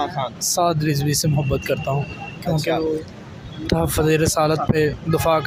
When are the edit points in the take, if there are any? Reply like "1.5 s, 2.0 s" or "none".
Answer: none